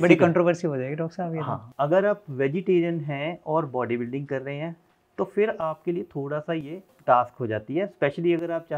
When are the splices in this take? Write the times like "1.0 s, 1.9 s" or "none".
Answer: 1.6 s, 6.9 s